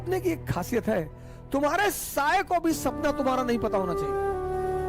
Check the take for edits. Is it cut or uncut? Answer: cut